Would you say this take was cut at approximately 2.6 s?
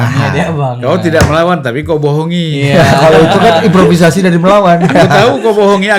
no; 0 cuts

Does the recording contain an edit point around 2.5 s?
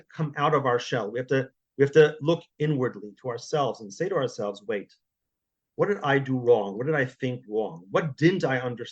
yes; 1 cut; at 2.5 s

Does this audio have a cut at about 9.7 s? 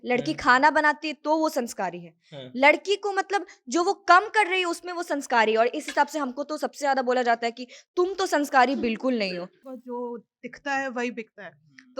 yes; 1 cut; at 9.7 s

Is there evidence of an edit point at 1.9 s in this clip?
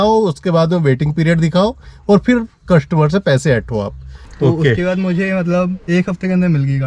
no; 1 cut; at 4.2 s

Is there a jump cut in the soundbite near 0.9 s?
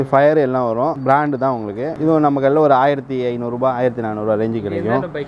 no; 0 cuts

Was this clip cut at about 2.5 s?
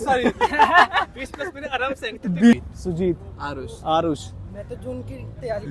yes; 1 cut; at 2.5 s

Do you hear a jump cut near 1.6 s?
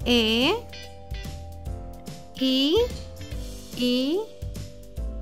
no; 1 cut; at 4.3 s

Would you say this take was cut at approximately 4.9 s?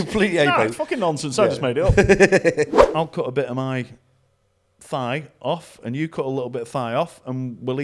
no; 1 cut; at 2.8 s

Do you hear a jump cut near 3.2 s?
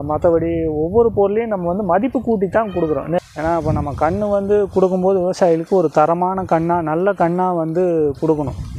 yes; 1 cut; at 3.2 s

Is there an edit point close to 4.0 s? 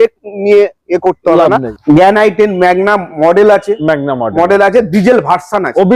no; 1 cut; at 1.7 s

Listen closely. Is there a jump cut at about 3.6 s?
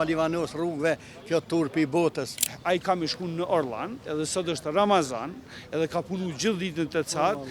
no; 1 cut; at 2.4 s

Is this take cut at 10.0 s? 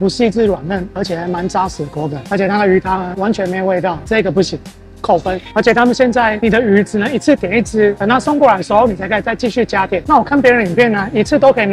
yes; 1 cut; at 10.0 s

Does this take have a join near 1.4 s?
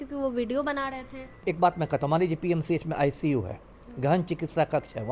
yes; 1 cut; at 1.4 s

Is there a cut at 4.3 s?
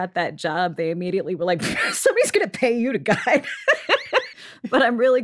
yes; 1 cut; at 4.3 s

